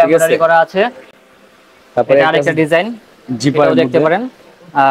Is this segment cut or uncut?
uncut